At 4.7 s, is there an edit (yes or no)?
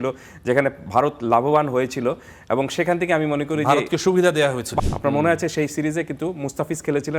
yes